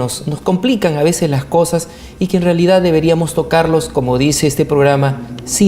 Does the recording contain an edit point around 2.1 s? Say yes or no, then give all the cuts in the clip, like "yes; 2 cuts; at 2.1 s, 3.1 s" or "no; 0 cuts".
no; 1 cut; at 3.9 s